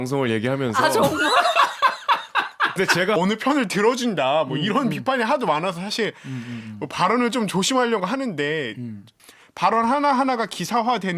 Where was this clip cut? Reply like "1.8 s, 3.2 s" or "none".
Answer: 3.2 s, 9.1 s